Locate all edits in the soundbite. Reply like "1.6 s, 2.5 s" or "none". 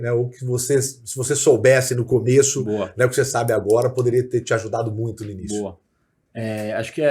none